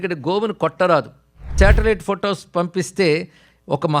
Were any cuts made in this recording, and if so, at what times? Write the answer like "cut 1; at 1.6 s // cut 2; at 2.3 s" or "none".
cut 1; at 1.6 s